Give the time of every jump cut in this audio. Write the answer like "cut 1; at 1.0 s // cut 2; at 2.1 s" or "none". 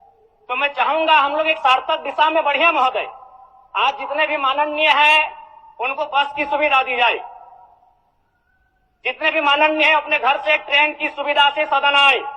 none